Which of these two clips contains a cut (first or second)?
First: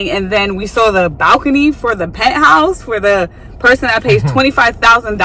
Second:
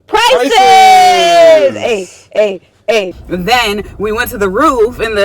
second